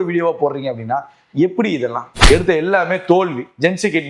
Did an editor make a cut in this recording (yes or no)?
yes